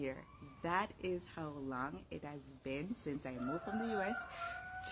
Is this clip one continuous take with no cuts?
yes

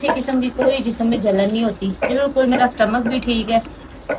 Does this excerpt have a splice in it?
no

